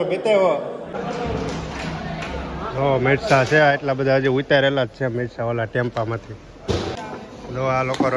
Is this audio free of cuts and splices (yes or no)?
no